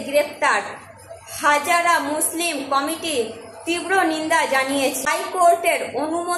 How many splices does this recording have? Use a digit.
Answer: 1